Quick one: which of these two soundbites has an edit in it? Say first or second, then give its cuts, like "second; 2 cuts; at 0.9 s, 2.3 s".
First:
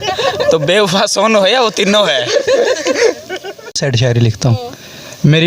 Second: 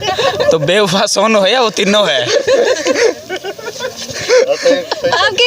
first; 1 cut; at 3.8 s